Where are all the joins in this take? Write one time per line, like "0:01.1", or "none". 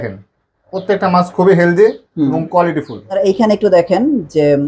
0:03.2